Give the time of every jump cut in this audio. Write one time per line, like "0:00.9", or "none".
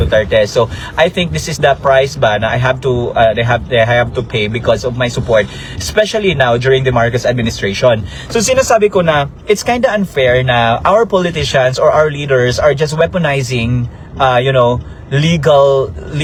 none

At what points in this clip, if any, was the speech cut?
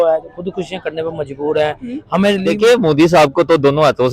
0:02.4

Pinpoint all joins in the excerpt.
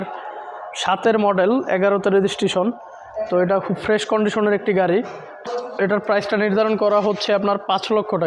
0:05.4

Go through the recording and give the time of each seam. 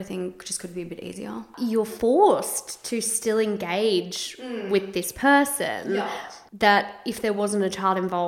0:01.5
0:05.9

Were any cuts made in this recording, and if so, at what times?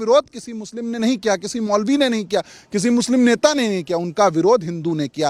none

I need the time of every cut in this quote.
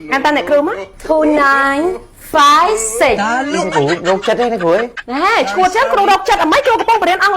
0:05.0

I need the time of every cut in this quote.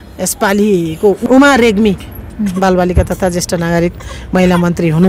0:01.2
0:02.1

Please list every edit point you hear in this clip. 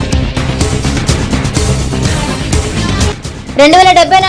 none

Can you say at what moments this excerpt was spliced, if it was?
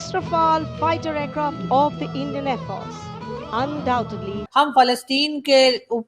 0:04.4

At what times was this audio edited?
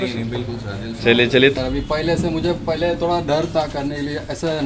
0:01.5

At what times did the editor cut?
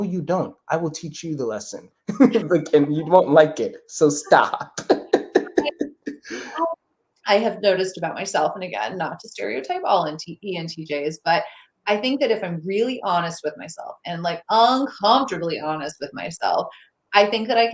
0:06.8

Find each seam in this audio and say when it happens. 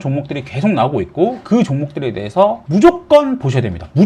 none

